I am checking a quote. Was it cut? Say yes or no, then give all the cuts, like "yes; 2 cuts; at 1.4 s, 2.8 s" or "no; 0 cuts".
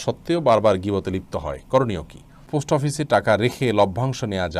yes; 1 cut; at 2.5 s